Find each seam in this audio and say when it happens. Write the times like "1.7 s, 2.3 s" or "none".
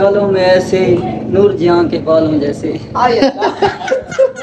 none

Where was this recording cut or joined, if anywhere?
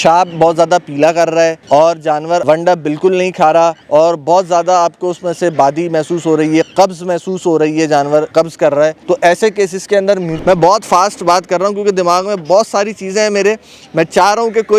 1.6 s, 2.4 s, 3.8 s, 8.5 s, 10.3 s

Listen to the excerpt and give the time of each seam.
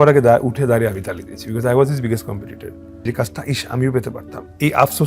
3.0 s

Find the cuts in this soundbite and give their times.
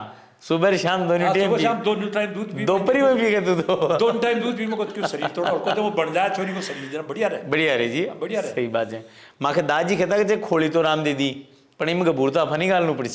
none

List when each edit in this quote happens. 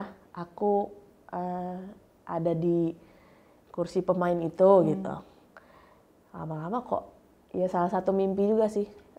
none

